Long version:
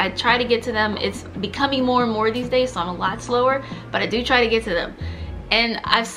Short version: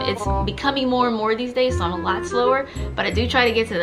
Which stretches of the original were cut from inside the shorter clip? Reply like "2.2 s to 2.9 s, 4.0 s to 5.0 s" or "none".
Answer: none